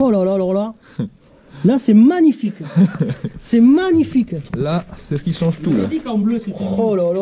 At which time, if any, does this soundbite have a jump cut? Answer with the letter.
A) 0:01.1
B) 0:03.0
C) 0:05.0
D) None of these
D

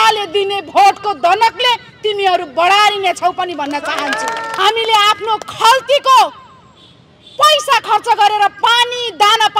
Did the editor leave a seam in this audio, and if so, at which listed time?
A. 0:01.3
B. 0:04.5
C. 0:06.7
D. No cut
B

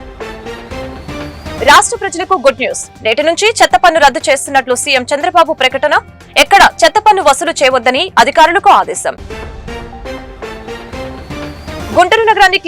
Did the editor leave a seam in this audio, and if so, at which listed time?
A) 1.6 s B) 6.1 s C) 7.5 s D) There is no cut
A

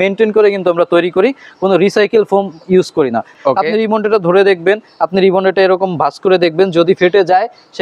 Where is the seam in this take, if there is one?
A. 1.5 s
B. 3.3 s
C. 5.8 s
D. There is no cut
B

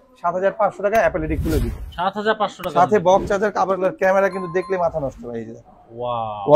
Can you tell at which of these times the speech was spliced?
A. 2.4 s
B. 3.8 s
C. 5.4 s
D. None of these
B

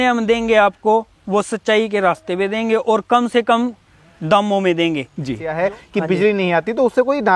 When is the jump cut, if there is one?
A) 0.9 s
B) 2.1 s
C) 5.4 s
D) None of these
C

